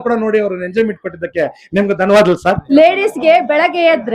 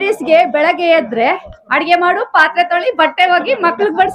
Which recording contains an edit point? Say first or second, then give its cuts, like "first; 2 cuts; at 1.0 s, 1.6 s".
first; 1 cut; at 2.6 s